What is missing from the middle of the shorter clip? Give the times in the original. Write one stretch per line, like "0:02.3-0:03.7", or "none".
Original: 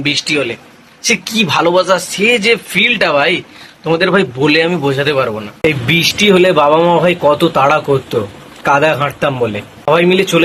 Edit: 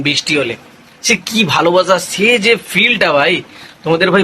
none